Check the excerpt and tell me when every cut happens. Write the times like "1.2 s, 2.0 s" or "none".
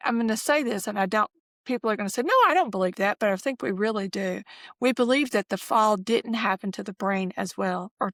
none